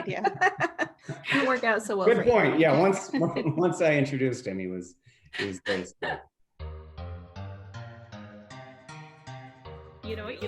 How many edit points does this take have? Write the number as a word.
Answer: one